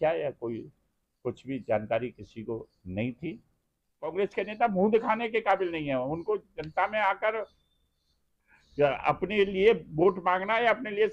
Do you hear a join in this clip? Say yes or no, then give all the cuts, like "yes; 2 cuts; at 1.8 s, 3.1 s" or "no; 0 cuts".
yes; 1 cut; at 4.1 s